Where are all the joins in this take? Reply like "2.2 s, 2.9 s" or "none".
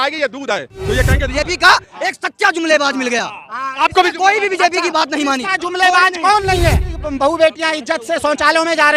1.2 s, 6.9 s